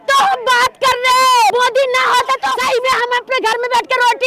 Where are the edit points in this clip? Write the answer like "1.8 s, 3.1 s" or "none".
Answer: 1.5 s, 2.6 s